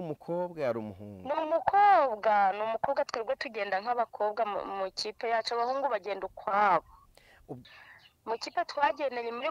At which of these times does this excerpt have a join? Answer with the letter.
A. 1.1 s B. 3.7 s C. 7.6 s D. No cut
C